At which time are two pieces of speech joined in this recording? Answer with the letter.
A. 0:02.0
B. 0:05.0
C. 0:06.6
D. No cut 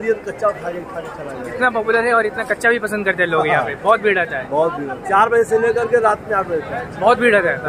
B